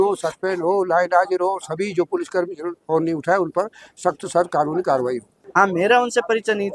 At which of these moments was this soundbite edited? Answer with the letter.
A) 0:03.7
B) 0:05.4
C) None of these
B